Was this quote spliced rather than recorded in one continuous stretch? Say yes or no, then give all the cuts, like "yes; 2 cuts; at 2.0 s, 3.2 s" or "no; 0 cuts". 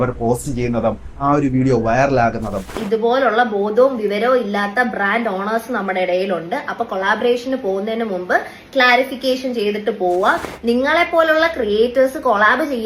yes; 2 cuts; at 2.8 s, 10.5 s